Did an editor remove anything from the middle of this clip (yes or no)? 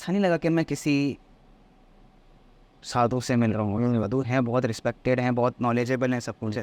no